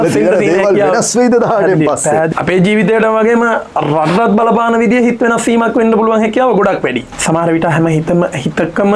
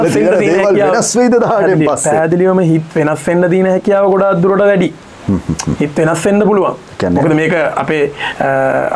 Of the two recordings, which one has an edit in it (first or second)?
first